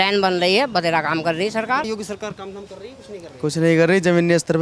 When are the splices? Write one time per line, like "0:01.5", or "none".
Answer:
0:01.9